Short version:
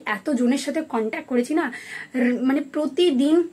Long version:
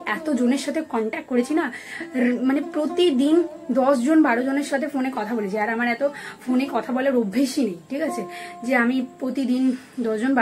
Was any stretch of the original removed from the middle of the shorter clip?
no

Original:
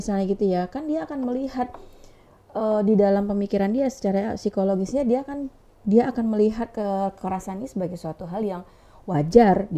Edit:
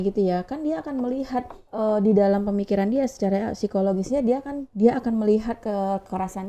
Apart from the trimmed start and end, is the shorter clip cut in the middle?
yes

